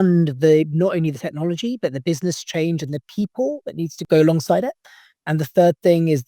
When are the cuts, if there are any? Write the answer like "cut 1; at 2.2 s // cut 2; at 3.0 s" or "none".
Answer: cut 1; at 4.0 s